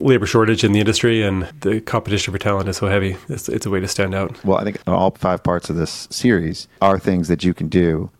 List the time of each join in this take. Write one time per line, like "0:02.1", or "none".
0:01.5
0:04.3